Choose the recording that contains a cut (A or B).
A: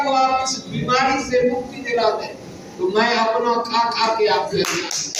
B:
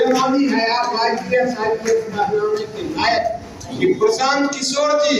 B